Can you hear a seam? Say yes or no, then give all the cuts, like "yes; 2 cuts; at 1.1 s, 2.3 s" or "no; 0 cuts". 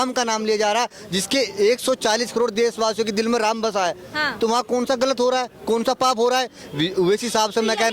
no; 0 cuts